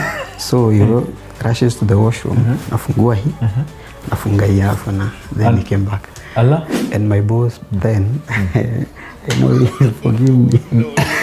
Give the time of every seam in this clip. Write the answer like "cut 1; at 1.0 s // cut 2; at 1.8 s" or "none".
cut 1; at 6.8 s